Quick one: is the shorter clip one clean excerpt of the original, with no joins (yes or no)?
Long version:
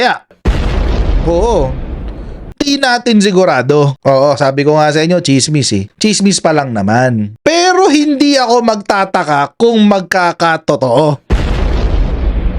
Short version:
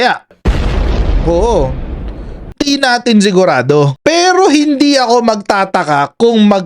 no